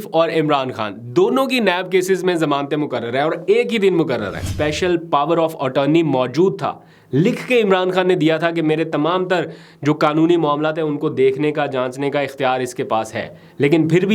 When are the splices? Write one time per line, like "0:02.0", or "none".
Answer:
0:04.5